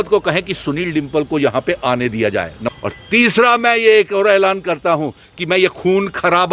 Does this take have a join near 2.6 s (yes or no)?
yes